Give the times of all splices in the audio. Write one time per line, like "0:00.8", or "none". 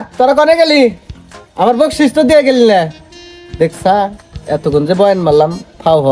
none